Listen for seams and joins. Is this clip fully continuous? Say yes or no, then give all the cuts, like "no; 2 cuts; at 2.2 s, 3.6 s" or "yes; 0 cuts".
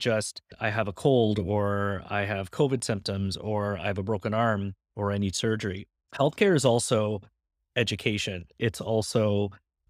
yes; 0 cuts